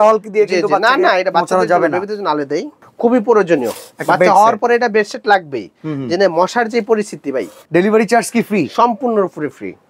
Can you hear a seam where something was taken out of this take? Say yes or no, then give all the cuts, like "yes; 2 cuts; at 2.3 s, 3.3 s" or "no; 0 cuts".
yes; 2 cuts; at 2.8 s, 7.5 s